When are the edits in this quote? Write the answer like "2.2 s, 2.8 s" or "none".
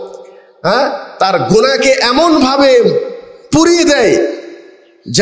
none